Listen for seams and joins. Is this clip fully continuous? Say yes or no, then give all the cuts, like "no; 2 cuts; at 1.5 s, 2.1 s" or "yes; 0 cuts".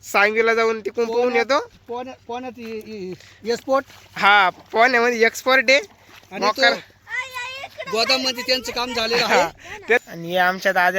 no; 1 cut; at 10.0 s